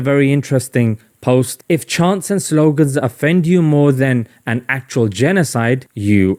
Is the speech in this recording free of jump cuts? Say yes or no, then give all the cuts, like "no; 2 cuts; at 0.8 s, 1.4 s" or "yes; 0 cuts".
yes; 0 cuts